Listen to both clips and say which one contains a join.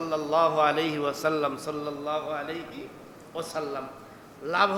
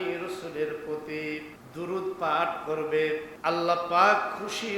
second; 2 cuts; at 1.6 s, 3.3 s

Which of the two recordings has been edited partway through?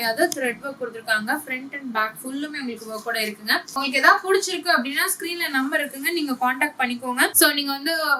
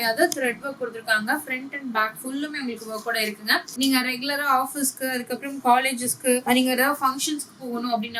second; 1 cut; at 3.7 s

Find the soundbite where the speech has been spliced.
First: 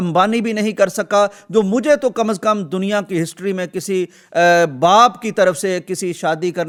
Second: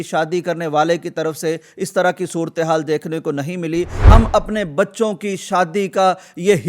second; 1 cut; at 4.0 s

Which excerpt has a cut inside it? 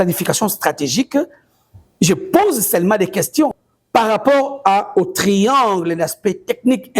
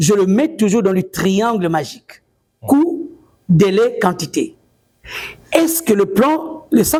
first; 1 cut; at 3.6 s

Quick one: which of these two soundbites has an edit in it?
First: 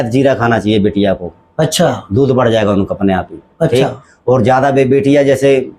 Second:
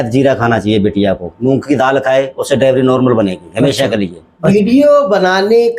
second; 2 cuts; at 1.3 s, 4.3 s

